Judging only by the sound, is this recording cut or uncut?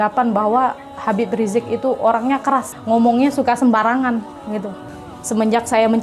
cut